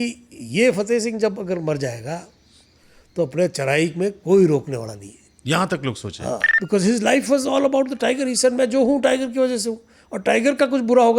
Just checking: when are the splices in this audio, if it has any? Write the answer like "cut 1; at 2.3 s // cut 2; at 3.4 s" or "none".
cut 1; at 6.5 s